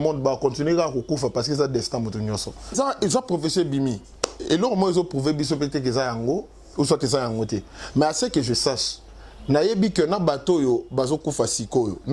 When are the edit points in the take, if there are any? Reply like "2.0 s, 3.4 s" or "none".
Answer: 2.7 s